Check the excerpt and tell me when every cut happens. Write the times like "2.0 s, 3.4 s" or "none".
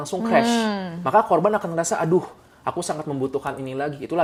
none